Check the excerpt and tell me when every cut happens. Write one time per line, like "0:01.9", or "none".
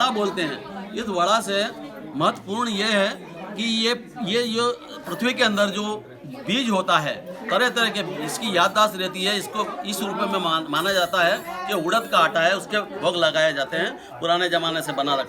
none